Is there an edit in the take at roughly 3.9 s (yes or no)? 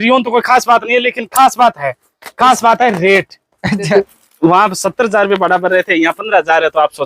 yes